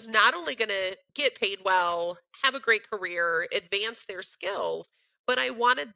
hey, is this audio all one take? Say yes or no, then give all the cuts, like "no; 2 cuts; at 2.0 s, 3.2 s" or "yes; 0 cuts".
no; 1 cut; at 1.0 s